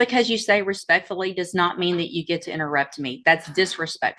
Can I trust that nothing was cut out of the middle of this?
yes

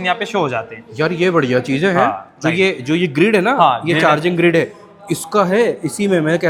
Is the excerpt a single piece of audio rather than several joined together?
yes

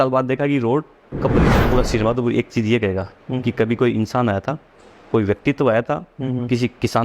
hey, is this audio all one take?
no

